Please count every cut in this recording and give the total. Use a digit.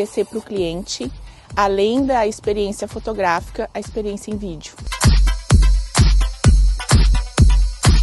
1